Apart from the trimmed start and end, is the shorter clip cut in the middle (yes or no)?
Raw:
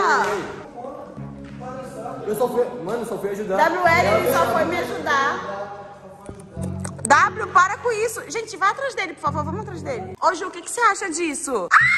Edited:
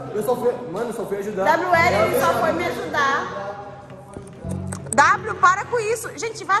no